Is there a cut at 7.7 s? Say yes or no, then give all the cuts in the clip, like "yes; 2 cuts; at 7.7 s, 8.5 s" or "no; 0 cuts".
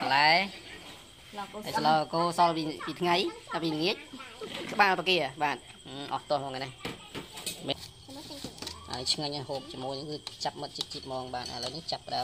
yes; 1 cut; at 7.7 s